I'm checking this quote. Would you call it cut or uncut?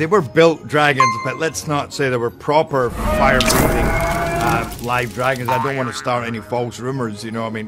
uncut